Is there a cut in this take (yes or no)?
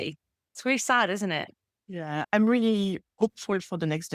no